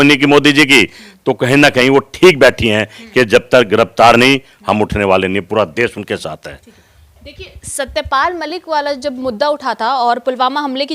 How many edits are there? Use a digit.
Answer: 0